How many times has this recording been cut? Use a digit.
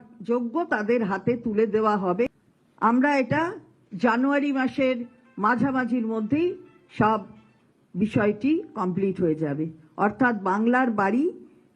1